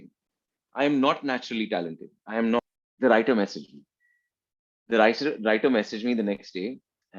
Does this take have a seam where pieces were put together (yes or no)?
yes